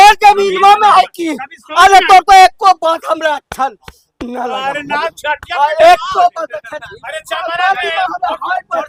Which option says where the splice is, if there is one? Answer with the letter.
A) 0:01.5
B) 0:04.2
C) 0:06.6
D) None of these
D